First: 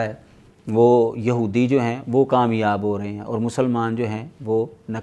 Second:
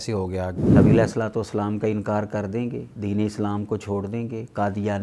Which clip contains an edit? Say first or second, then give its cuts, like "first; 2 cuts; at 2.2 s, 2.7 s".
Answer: second; 2 cuts; at 0.7 s, 2.9 s